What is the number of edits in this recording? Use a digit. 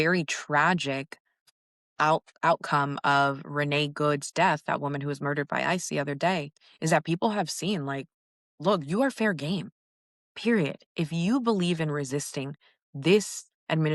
2